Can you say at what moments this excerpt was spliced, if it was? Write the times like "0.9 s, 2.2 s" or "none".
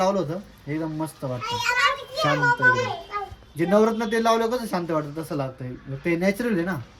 none